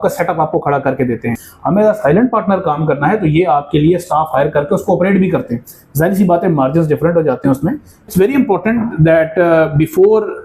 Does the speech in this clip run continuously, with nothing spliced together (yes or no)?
no